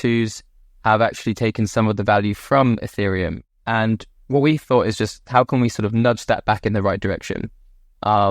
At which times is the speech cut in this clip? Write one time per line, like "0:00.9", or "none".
0:03.4